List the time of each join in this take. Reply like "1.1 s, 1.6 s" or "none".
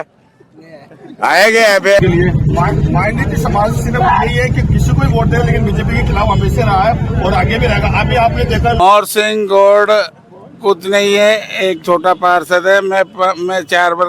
2.0 s, 8.8 s